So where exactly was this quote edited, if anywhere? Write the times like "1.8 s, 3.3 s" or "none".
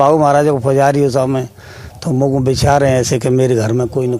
none

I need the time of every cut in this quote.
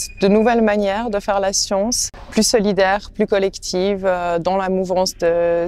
2.0 s

